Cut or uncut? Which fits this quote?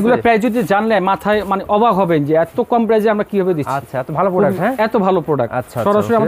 uncut